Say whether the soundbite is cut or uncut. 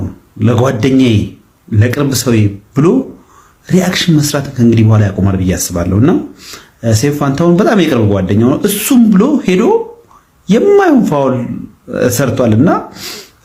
uncut